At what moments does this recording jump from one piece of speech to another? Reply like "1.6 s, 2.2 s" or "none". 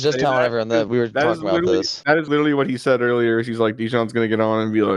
none